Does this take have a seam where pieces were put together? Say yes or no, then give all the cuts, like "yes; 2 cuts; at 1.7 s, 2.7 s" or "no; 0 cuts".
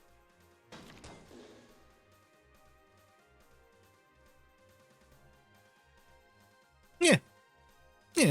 no; 0 cuts